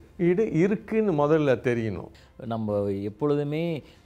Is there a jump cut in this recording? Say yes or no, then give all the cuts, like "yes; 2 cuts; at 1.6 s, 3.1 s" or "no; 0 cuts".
yes; 1 cut; at 2.1 s